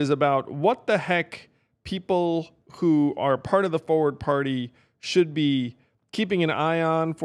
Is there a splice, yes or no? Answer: no